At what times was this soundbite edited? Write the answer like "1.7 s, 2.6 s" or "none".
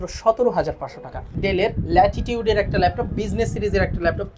1.4 s